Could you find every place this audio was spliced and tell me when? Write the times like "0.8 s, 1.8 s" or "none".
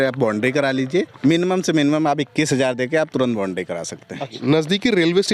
1.1 s, 4.4 s